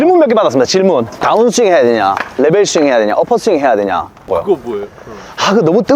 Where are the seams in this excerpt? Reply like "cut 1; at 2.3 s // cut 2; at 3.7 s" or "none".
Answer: cut 1; at 1.2 s // cut 2; at 4.3 s